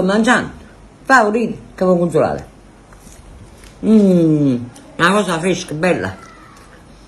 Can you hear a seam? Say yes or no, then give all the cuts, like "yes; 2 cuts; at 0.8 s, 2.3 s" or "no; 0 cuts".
no; 0 cuts